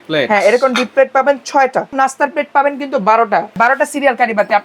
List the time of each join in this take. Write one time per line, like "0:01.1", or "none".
0:01.9
0:03.6